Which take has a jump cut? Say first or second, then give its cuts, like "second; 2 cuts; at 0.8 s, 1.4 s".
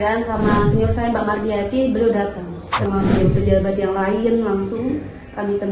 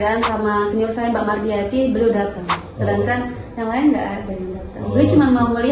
first; 1 cut; at 2.9 s